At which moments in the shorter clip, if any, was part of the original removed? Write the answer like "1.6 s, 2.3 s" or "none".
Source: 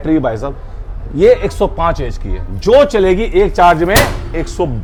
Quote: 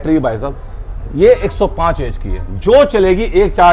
none